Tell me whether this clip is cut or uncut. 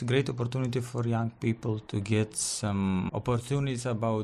cut